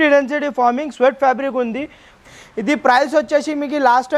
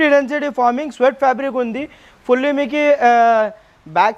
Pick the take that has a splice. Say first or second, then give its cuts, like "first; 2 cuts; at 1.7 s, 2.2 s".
first; 1 cut; at 2.2 s